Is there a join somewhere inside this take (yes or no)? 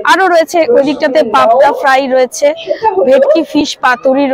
no